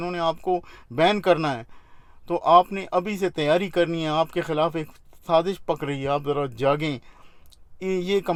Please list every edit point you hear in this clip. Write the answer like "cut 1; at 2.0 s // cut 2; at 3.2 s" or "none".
none